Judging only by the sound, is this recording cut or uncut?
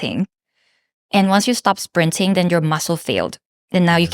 uncut